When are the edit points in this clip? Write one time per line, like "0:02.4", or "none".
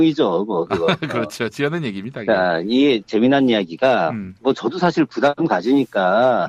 none